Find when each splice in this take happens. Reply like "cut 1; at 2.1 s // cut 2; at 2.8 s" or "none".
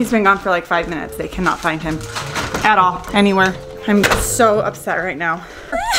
none

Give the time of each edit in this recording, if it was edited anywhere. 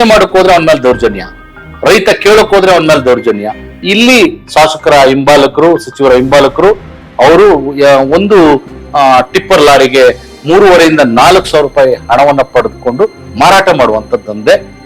cut 1; at 3.8 s

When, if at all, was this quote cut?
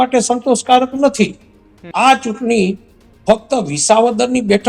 cut 1; at 1.8 s

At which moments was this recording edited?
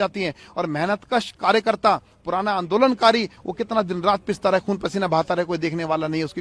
none

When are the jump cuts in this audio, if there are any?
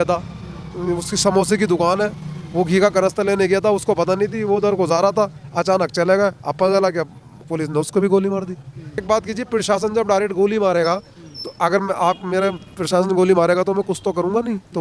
cut 1; at 9.0 s

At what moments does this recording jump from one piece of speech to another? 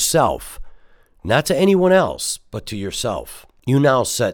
cut 1; at 3.4 s

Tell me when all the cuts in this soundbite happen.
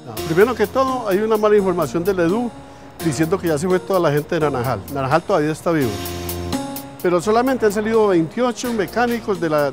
cut 1; at 1.0 s

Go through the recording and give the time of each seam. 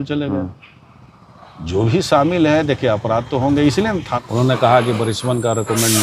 cut 1; at 4.1 s

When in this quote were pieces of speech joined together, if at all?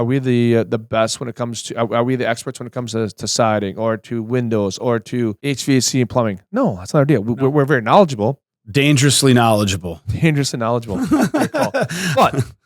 cut 1; at 5.4 s

